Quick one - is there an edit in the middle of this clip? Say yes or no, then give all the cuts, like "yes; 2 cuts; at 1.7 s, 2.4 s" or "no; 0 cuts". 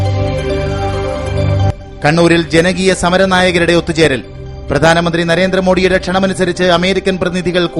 no; 0 cuts